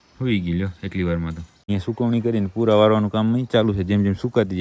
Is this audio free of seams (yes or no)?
no